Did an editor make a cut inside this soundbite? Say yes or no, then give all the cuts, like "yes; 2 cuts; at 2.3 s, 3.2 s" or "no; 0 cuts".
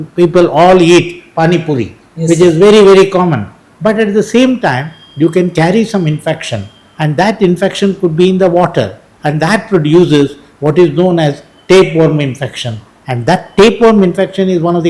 no; 0 cuts